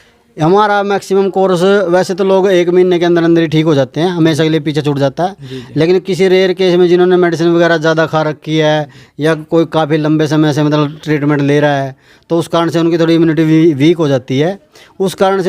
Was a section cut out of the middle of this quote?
no; 0 cuts

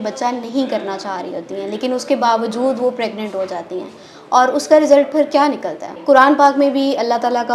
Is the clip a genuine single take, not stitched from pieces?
no; 1 cut; at 6.0 s

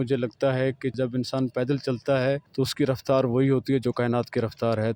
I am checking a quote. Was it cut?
yes; 2 cuts; at 0.9 s, 2.5 s

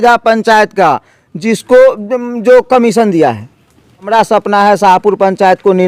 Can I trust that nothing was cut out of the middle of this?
no; 1 cut; at 4.1 s

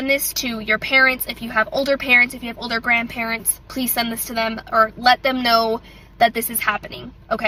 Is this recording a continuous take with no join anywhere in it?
yes; 0 cuts

